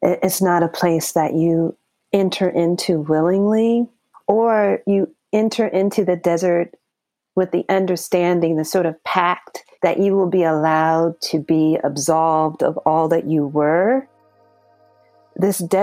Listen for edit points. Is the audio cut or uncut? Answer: uncut